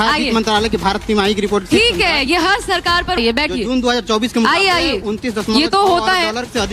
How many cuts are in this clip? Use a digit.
1